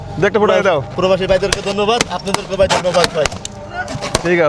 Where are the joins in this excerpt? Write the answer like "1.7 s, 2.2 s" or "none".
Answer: none